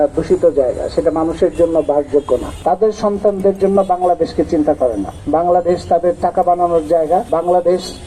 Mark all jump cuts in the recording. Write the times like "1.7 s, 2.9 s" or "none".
2.5 s, 5.1 s, 7.3 s